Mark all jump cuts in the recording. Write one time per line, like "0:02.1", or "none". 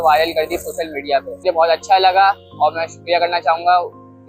0:01.4